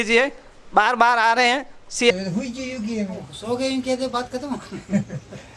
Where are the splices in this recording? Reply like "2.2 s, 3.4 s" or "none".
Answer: 2.1 s